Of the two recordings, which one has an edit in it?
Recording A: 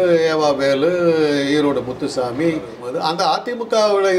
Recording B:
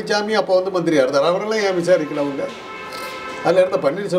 A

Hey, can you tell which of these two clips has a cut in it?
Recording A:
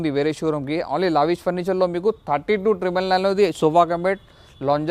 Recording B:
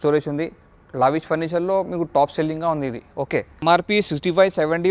B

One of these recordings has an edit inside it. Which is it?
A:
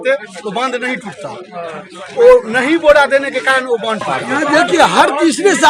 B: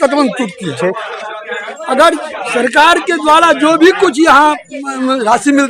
A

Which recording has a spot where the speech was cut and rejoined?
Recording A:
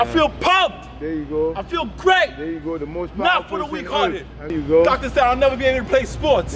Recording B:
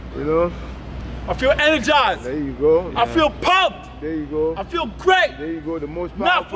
A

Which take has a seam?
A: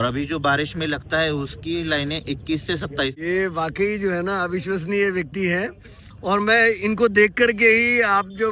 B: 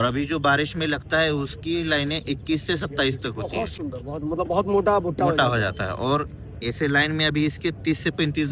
A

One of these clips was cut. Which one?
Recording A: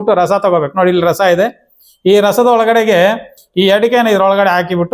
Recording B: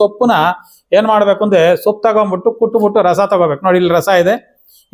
A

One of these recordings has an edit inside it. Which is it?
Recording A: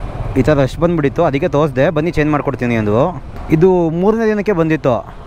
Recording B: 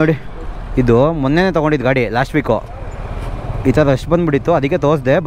A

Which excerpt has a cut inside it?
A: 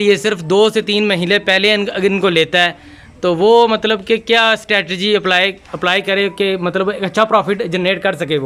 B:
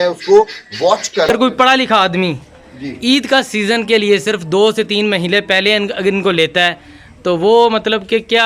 B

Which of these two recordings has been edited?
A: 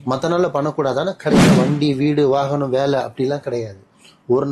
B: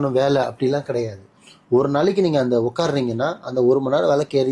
A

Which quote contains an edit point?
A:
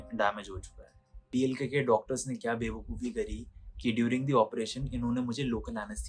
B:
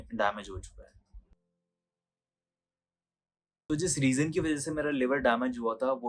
A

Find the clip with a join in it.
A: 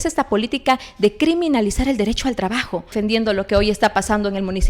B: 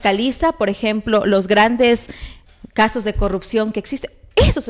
A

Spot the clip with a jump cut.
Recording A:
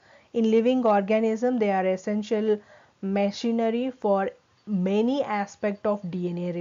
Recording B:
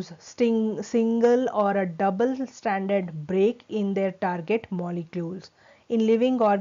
A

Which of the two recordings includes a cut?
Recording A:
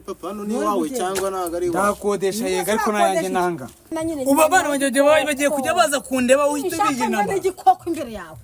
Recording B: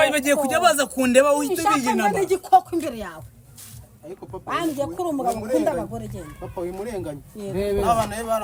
A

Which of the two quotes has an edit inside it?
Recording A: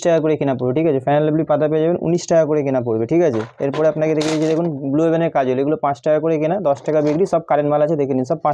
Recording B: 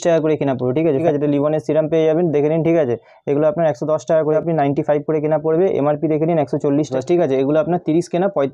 B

